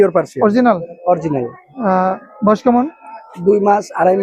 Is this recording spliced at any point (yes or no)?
no